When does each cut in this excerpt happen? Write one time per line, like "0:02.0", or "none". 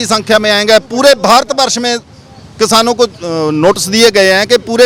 none